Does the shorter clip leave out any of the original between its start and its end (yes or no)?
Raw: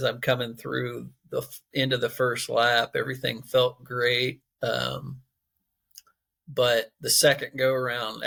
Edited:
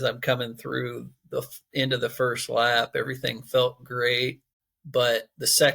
yes